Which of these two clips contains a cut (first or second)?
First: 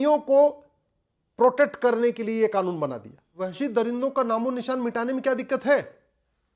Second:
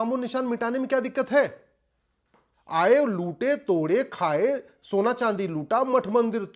first